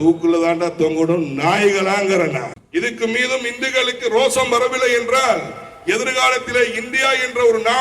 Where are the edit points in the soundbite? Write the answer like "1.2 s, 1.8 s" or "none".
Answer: 2.6 s